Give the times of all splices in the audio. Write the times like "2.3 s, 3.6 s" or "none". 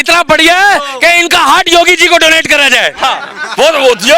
none